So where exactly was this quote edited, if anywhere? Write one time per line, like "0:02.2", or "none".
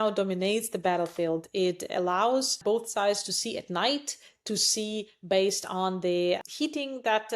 0:02.6
0:06.4

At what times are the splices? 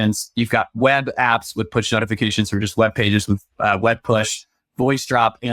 none

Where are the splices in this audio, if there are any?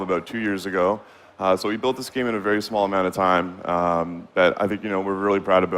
none

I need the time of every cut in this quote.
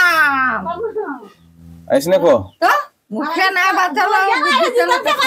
none

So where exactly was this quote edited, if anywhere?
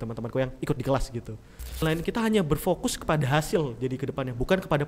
0:01.8

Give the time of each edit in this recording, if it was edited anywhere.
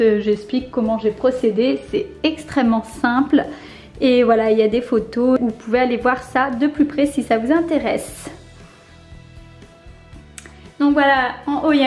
0:05.4

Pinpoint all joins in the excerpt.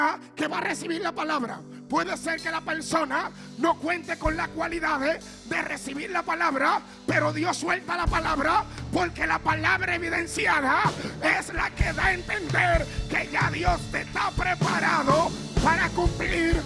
none

